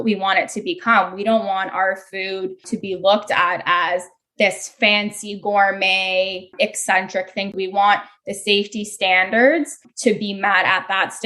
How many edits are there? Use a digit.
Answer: 4